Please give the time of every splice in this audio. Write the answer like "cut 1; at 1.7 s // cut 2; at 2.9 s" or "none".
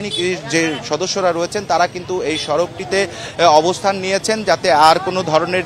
none